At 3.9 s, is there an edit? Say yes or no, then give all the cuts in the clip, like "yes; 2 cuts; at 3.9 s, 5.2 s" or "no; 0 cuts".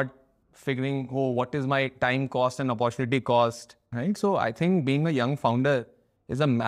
yes; 1 cut; at 3.9 s